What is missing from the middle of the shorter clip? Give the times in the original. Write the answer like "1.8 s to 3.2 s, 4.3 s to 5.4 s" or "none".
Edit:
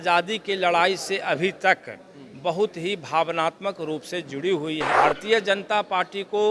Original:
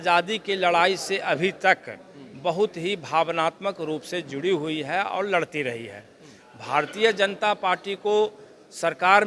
4.9 s to 6.6 s